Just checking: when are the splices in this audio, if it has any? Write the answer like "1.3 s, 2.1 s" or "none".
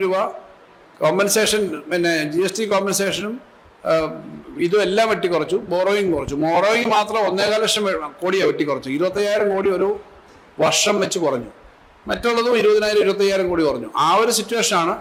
none